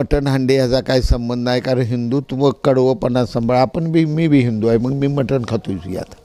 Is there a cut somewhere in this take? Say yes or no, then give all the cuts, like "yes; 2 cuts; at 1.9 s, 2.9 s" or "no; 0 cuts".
no; 0 cuts